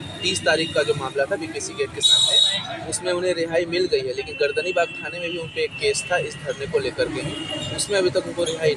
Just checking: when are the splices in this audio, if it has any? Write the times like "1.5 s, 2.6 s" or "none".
none